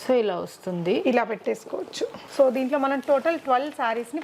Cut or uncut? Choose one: cut